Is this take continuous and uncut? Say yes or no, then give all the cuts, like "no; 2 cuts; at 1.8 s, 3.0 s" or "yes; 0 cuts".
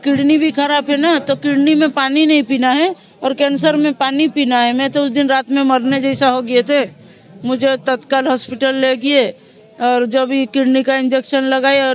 yes; 0 cuts